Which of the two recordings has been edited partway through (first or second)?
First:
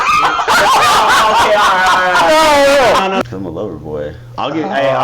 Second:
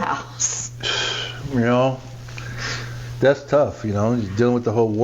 first